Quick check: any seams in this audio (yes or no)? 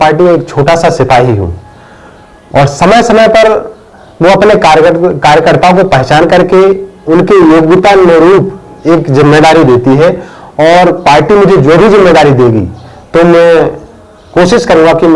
no